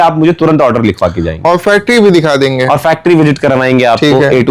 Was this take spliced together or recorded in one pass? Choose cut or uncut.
uncut